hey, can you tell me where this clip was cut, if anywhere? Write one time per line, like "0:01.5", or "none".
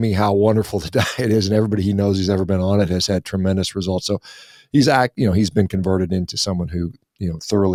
none